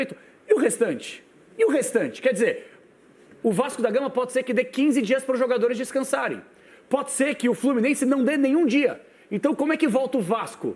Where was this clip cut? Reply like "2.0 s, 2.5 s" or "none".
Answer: none